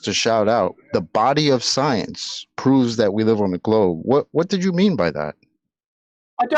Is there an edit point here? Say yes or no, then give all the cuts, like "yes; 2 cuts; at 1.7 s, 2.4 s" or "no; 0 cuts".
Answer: no; 0 cuts